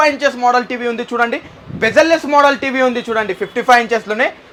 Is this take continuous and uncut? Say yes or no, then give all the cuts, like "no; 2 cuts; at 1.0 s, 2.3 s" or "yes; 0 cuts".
yes; 0 cuts